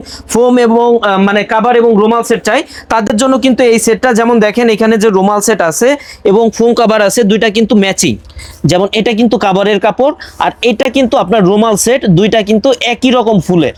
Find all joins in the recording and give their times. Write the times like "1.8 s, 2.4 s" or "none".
none

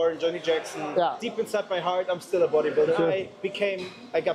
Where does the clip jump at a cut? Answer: 3.0 s

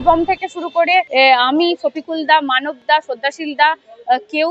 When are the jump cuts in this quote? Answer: 1.1 s

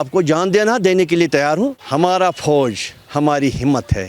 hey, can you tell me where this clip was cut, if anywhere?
1.7 s

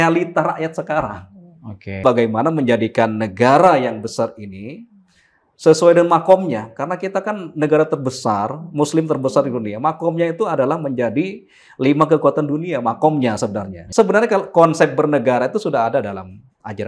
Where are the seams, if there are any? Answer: 2.0 s, 13.8 s

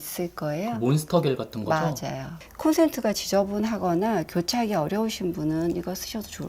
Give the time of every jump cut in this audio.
2.2 s

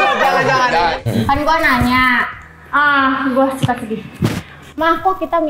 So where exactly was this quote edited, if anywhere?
0.9 s

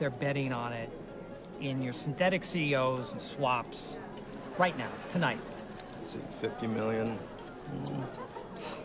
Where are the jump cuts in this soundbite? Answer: none

